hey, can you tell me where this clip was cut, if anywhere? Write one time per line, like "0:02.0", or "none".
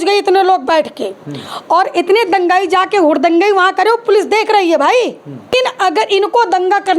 0:05.5